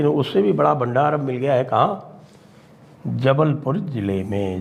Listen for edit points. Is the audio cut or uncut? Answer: uncut